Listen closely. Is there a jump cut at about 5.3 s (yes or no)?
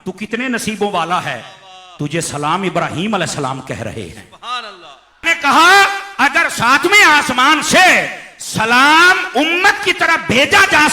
yes